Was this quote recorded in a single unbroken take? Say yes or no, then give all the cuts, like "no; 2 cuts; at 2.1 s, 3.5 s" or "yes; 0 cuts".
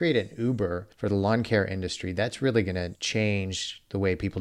no; 2 cuts; at 0.9 s, 3.0 s